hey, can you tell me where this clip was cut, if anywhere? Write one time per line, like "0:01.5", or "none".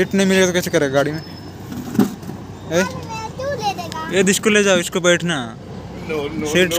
none